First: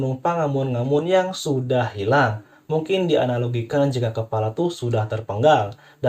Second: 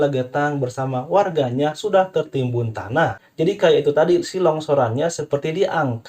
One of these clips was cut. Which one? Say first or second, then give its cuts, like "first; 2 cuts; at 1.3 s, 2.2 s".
second; 1 cut; at 3.2 s